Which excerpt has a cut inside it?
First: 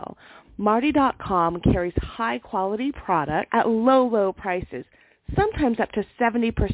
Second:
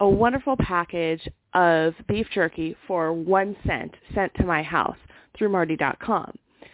first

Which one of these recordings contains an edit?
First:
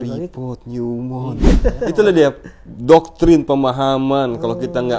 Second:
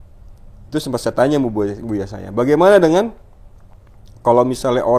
first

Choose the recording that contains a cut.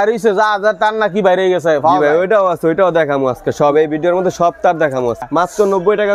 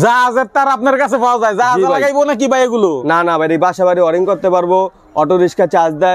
first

